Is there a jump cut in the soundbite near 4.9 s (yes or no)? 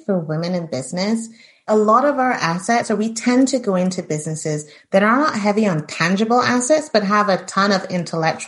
no